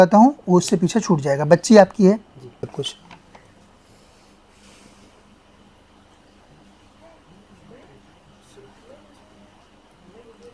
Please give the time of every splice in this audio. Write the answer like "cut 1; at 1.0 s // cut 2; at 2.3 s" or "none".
cut 1; at 2.6 s